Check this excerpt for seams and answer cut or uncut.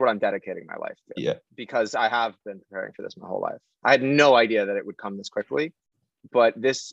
cut